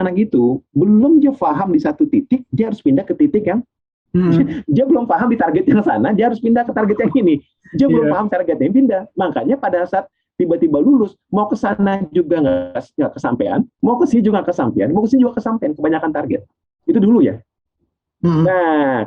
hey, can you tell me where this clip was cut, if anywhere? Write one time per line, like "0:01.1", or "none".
none